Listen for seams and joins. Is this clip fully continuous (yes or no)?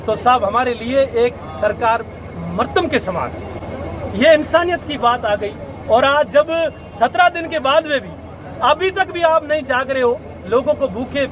yes